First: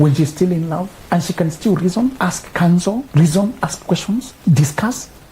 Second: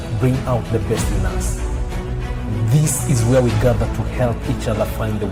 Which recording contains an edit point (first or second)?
first